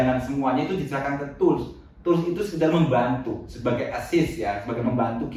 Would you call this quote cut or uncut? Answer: uncut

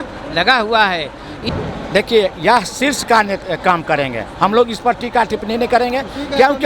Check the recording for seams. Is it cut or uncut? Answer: cut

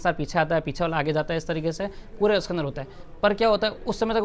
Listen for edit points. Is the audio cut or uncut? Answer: uncut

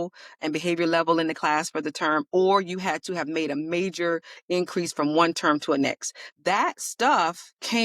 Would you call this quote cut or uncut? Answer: cut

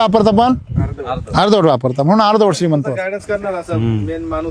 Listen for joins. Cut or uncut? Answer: uncut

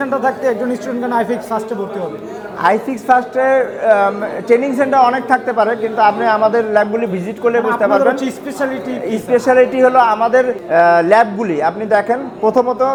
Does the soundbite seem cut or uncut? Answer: uncut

